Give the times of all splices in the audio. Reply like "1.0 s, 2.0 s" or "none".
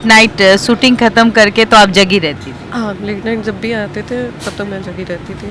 none